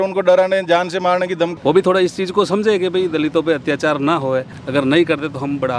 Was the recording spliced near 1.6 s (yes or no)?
yes